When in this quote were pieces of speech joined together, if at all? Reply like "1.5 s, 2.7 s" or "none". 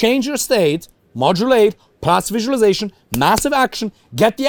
none